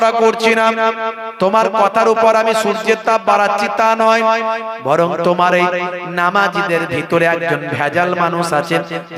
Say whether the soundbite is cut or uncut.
uncut